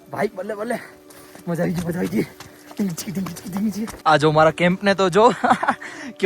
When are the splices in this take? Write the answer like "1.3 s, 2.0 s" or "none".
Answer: 3.9 s